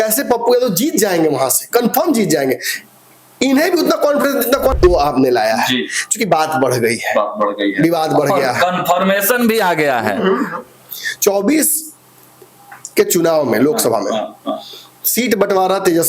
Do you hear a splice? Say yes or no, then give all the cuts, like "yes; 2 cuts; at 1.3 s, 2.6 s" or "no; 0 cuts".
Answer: yes; 1 cut; at 4.7 s